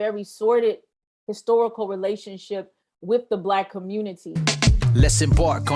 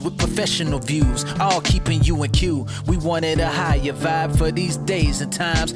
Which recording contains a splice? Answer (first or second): first